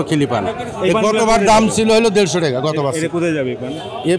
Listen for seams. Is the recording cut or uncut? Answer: uncut